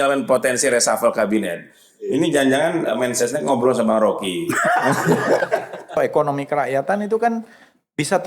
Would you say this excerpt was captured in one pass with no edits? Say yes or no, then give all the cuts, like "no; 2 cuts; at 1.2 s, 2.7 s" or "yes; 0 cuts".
no; 1 cut; at 6.0 s